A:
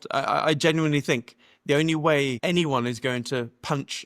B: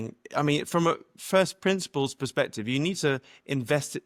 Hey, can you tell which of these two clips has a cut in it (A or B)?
A